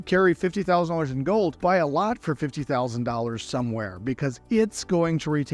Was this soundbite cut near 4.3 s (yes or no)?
no